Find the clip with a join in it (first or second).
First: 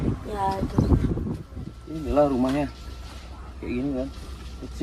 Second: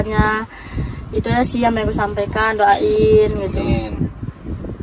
first